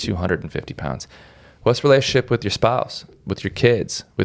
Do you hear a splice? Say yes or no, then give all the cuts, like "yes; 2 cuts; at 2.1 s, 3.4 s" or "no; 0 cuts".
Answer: no; 0 cuts